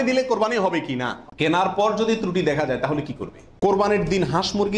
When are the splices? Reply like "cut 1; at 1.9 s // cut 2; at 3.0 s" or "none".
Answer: cut 1; at 1.2 s // cut 2; at 3.6 s